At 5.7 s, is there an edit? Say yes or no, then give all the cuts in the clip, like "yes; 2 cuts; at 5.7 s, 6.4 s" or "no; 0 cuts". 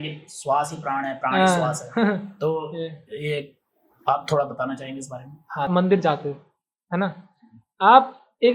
yes; 1 cut; at 5.7 s